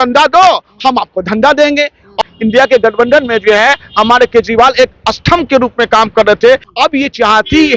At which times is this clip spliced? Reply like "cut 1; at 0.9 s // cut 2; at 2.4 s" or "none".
cut 1; at 2.2 s // cut 2; at 6.7 s